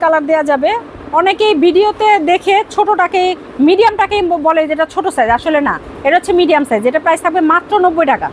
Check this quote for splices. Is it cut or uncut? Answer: uncut